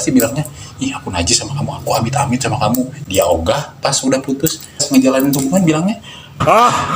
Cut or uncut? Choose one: cut